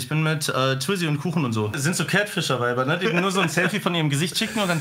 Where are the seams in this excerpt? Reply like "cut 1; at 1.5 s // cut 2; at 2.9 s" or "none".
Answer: cut 1; at 1.8 s